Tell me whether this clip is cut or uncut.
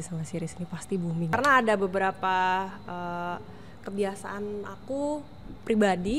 cut